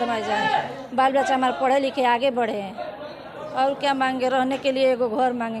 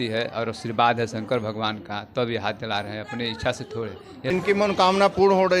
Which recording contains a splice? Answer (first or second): second